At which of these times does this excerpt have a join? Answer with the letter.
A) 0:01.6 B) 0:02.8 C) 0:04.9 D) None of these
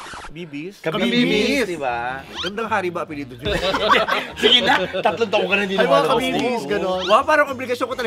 D